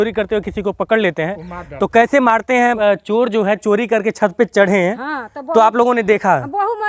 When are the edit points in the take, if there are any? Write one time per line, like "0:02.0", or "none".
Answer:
0:02.8